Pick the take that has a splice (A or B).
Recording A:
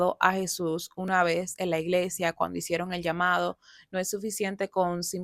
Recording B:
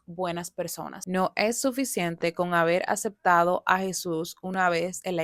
B